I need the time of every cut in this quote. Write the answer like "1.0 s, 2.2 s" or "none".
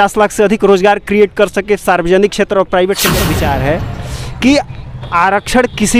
3.1 s